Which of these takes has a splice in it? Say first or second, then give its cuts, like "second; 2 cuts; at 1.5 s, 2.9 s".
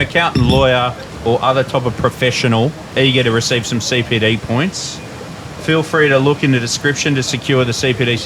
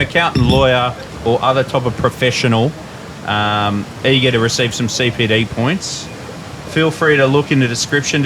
first; 1 cut; at 2.8 s